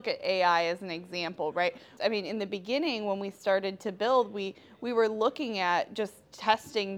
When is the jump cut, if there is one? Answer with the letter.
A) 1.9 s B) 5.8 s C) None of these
A